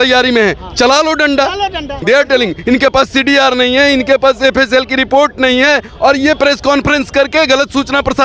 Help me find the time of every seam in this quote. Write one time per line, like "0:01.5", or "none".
0:02.0

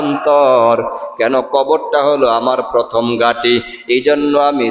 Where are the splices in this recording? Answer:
none

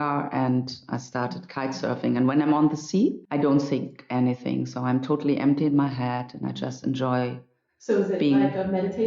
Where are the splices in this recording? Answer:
0:03.2

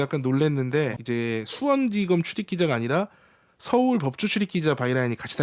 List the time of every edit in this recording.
0:01.0

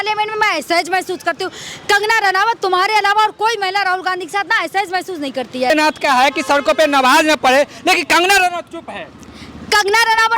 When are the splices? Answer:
0:05.7

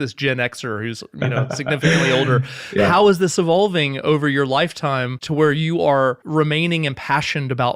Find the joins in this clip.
0:05.2
0:06.2

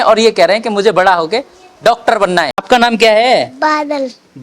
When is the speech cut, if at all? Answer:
0:02.6

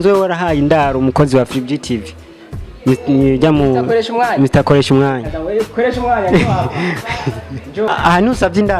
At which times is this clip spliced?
0:07.9

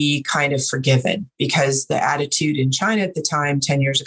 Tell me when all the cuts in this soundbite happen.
none

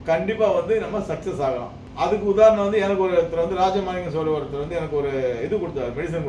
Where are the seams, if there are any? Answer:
none

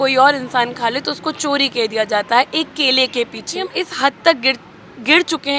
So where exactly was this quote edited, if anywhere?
0:03.7

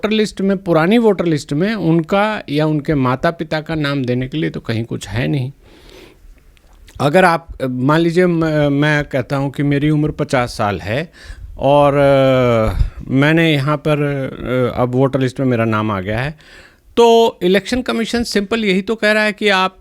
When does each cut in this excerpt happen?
none

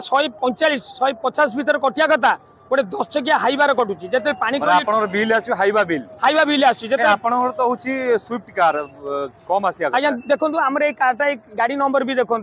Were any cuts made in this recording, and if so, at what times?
none

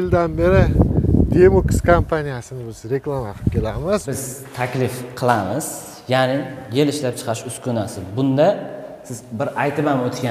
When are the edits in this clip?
0:04.1

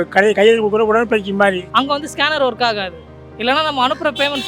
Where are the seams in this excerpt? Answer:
0:01.6

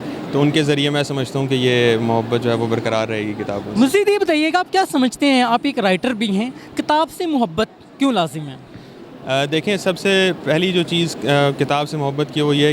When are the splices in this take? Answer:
none

